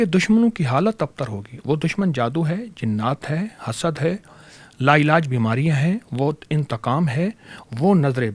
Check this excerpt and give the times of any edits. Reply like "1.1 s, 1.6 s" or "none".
none